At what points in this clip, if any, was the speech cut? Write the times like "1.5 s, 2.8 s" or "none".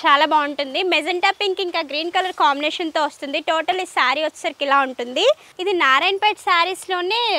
5.5 s